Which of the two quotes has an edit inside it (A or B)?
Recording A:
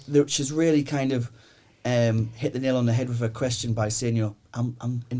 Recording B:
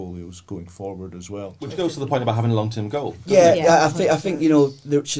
B